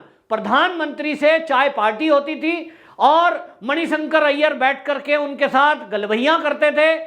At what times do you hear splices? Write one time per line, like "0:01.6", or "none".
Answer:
none